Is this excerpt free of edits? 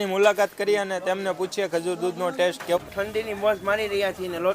no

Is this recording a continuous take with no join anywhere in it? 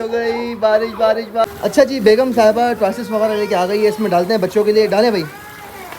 no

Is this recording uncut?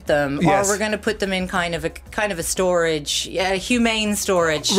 yes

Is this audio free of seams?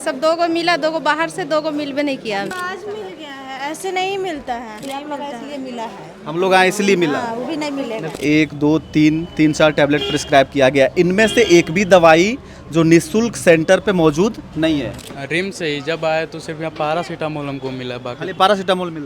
no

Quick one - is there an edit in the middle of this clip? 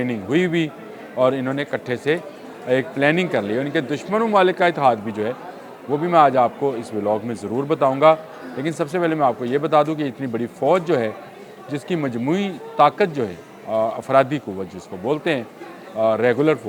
no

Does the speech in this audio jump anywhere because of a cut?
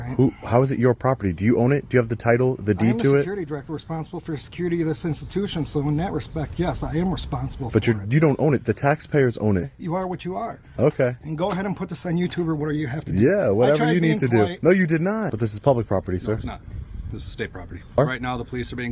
yes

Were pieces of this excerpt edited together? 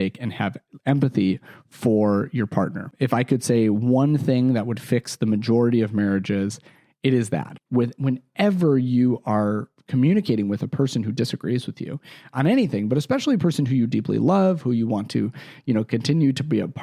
yes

